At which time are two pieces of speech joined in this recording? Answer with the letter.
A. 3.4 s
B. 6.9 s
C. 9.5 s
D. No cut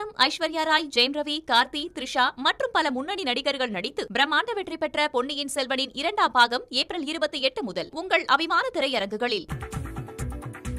C